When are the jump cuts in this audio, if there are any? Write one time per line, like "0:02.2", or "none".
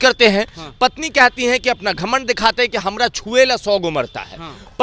none